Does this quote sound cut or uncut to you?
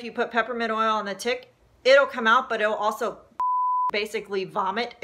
uncut